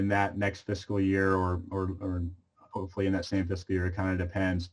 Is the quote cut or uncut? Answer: uncut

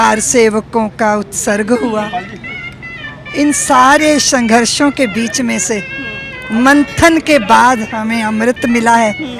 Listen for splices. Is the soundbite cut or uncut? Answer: uncut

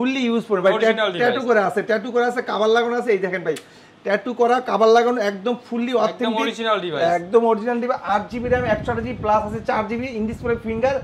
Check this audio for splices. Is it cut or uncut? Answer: uncut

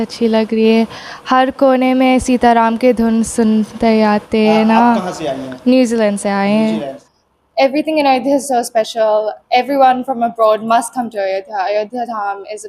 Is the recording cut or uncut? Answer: cut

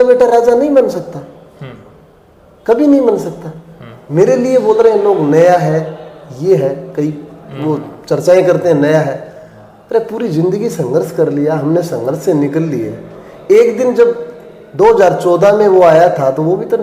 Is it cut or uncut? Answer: uncut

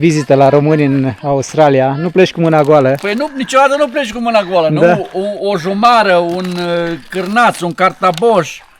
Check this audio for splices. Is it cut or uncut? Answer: uncut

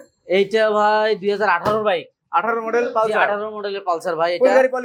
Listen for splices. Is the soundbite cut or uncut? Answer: uncut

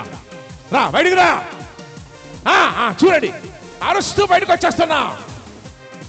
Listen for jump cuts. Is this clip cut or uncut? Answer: uncut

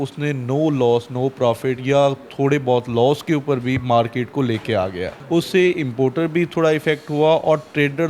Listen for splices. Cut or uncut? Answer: cut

